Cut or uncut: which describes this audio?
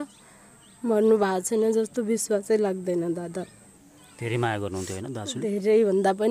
uncut